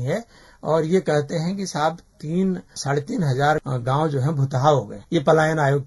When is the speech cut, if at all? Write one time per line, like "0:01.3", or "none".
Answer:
0:02.7
0:03.6
0:05.0